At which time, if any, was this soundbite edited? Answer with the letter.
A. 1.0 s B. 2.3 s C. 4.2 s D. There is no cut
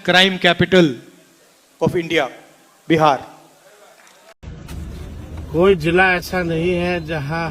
C